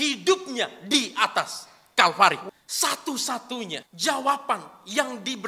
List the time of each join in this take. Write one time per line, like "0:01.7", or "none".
0:02.4
0:03.8